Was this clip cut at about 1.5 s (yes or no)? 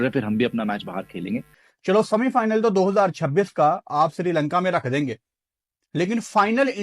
yes